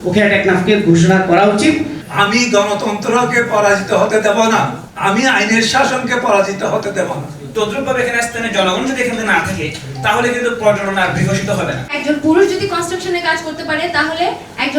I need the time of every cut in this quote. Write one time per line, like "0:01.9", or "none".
0:02.0
0:04.8
0:07.4
0:12.0